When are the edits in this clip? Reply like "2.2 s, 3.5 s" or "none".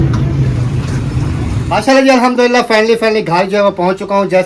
1.7 s